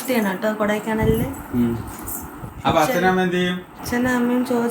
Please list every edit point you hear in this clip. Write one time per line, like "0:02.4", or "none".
0:03.7